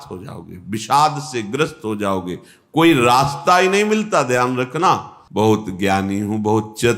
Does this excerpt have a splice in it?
yes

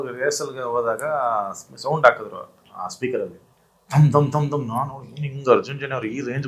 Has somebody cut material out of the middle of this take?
no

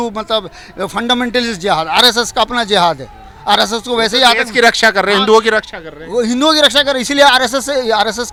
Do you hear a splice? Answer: no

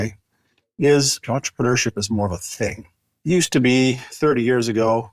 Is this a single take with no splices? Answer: no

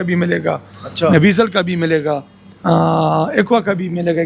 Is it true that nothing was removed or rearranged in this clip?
yes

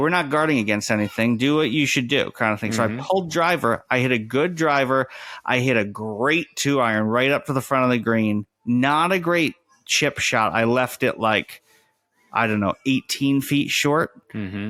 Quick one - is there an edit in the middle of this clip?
no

